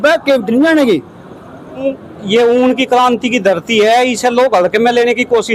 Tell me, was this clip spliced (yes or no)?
no